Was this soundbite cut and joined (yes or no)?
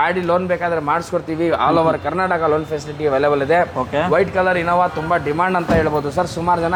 no